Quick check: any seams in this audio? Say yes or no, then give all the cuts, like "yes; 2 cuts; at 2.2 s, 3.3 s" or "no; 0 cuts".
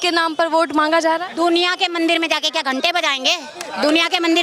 no; 0 cuts